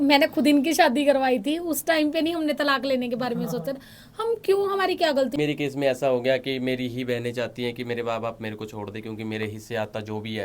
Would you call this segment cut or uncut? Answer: cut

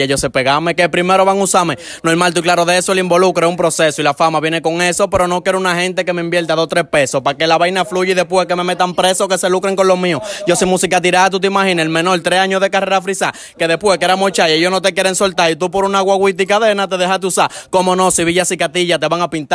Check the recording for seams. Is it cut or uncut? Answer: uncut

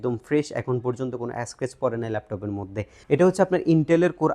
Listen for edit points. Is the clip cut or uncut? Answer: cut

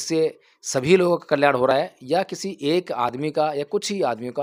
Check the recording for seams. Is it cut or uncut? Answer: uncut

